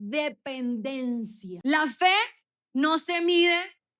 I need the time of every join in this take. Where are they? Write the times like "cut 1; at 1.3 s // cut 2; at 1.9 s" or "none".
cut 1; at 1.4 s